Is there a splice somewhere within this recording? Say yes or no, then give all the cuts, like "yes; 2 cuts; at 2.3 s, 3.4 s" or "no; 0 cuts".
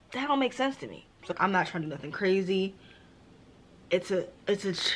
yes; 1 cut; at 1.3 s